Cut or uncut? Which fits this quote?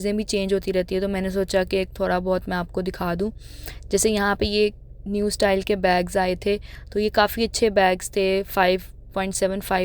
uncut